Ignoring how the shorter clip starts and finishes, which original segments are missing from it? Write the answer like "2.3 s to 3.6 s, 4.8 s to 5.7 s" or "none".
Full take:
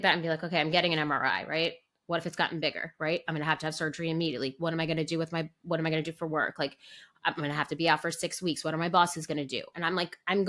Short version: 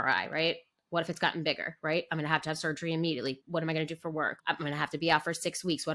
4.5 s to 5.5 s, 6.5 s to 7.1 s